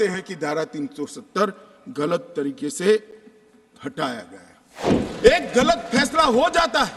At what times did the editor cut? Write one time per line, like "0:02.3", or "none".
0:04.8